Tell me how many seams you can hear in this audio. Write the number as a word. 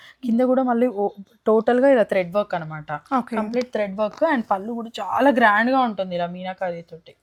zero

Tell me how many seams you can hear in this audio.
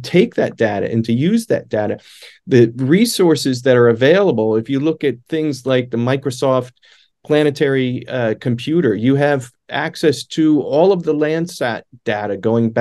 zero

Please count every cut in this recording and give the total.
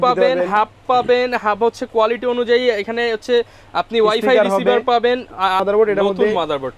one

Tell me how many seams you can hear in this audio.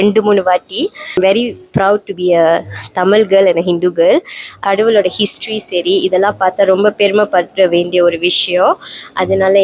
two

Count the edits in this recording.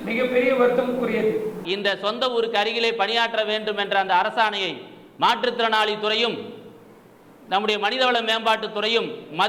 one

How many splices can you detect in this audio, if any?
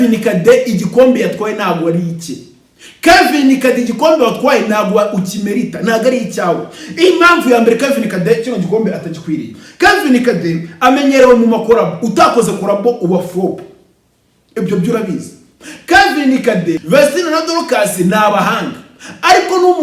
one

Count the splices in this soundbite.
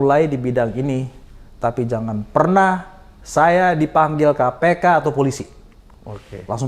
zero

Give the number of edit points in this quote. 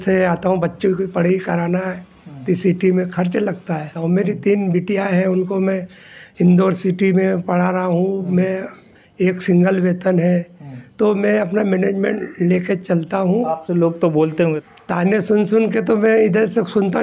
three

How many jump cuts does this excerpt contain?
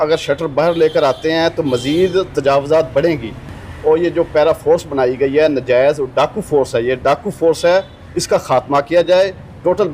one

